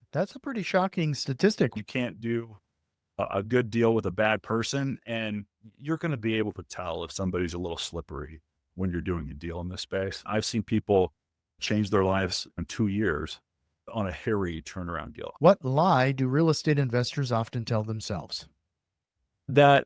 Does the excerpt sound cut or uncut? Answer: cut